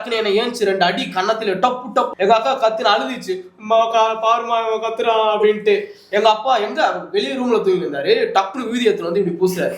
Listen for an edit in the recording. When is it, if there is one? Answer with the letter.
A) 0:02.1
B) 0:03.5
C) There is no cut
A